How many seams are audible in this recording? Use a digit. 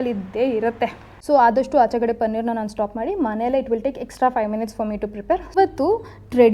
2